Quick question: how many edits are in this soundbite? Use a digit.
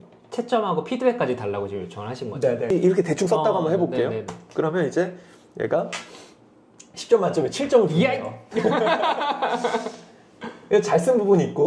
1